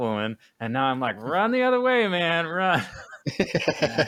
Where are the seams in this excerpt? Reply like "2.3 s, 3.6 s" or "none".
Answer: none